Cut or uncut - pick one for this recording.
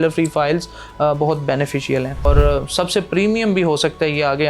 cut